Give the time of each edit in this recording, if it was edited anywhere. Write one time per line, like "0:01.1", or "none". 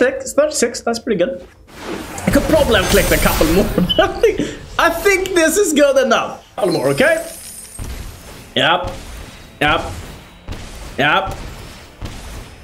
0:06.6